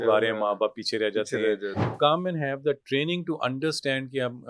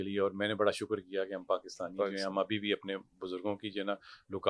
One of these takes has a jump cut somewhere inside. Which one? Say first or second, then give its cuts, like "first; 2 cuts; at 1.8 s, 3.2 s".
first; 1 cut; at 1.9 s